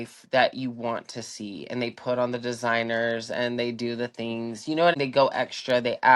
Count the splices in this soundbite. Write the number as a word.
one